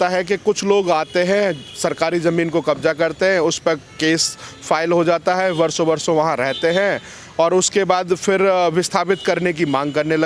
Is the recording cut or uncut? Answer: uncut